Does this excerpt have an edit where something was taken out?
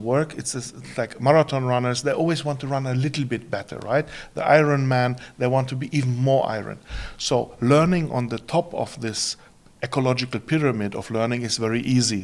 no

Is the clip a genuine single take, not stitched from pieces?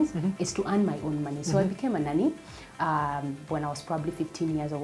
yes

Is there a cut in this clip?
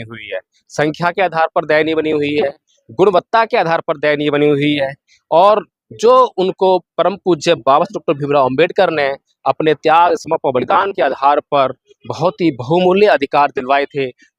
no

